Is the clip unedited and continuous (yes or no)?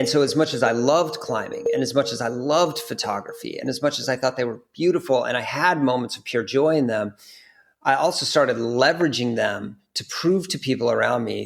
yes